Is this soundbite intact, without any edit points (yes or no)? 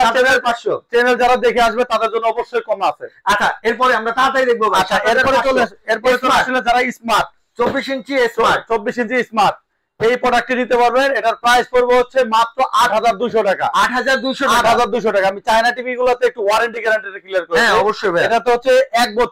yes